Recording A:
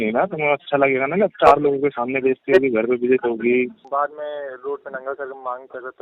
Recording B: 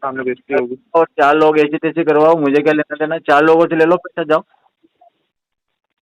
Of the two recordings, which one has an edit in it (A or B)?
A